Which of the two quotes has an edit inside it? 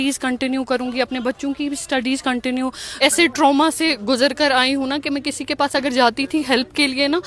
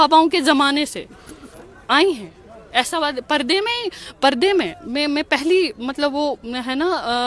first; 1 cut; at 3.0 s

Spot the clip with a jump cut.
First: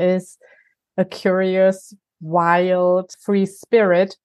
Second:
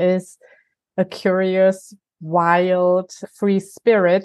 first; 1 cut; at 3.1 s

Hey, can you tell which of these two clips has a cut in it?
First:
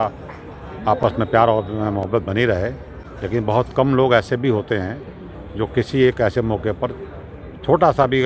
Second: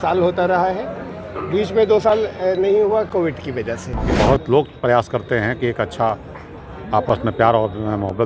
second; 1 cut; at 4.1 s

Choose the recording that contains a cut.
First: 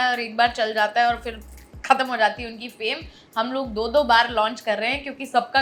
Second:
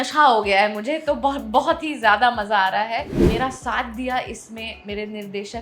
second; 1 cut; at 3.3 s

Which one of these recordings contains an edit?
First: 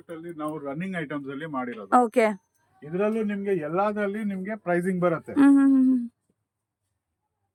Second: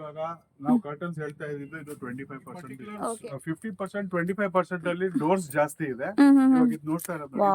second; 1 cut; at 3.2 s

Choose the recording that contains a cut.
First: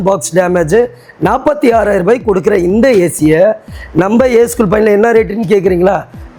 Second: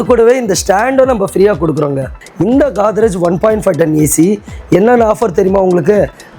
second; 1 cut; at 2.1 s

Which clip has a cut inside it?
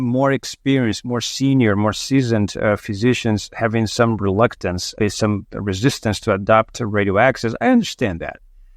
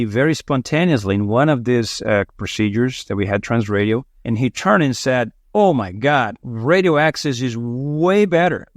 second; 2 cuts; at 4.1 s, 5.4 s

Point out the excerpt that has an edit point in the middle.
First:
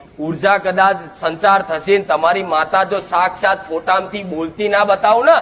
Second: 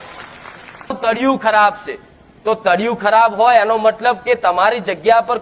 second; 1 cut; at 1.0 s

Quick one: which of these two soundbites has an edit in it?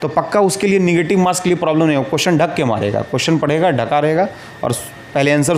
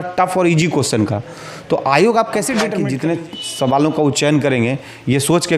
second; 1 cut; at 2.7 s

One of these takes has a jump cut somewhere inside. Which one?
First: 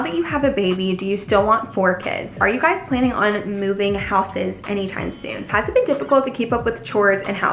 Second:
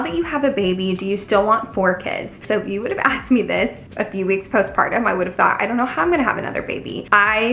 first; 2 cuts; at 2.3 s, 5.5 s

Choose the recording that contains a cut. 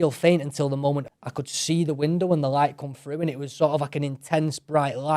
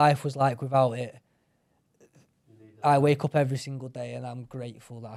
first; 1 cut; at 1.1 s

